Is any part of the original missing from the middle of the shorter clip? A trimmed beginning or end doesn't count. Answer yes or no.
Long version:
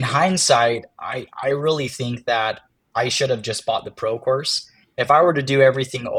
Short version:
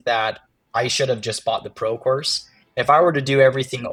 no